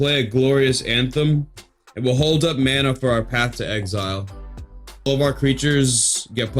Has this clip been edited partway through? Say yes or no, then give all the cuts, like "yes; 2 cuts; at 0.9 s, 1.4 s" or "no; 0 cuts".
yes; 1 cut; at 5.1 s